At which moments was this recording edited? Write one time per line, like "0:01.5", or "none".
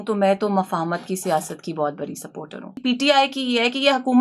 0:02.8